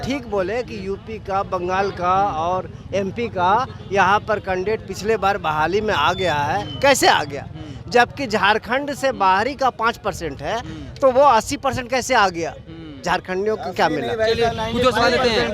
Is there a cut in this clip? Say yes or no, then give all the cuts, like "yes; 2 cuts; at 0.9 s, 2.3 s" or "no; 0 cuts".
no; 0 cuts